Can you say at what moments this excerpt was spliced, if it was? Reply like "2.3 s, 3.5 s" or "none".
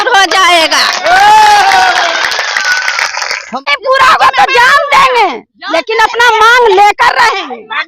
3.5 s